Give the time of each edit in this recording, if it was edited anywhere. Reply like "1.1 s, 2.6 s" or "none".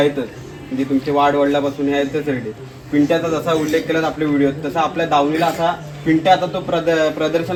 none